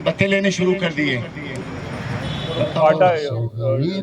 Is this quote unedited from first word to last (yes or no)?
no